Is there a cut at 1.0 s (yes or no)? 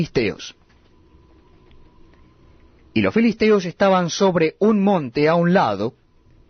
yes